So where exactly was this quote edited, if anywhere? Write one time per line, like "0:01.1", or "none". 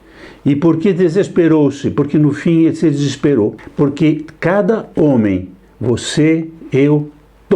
0:03.6